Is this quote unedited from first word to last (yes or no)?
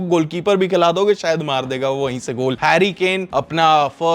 no